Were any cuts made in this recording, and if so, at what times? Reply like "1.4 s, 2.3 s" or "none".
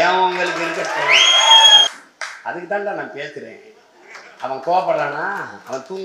1.9 s

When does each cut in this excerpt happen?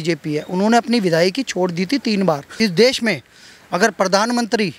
2.5 s

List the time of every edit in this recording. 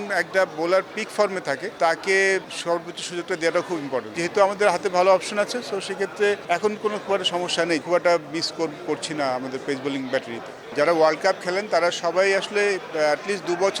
4.2 s, 7.8 s, 10.7 s

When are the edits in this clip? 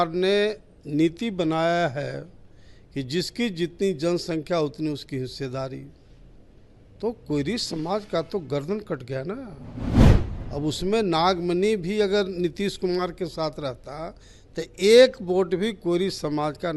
none

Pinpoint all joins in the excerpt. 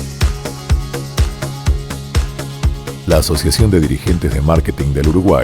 2.6 s

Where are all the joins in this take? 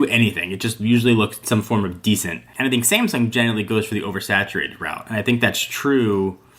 2.5 s

